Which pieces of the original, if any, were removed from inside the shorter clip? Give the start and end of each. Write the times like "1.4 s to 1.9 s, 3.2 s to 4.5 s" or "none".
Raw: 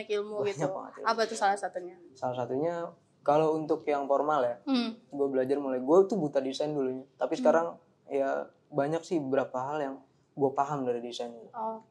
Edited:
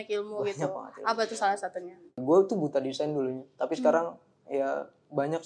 2.2 s to 5.8 s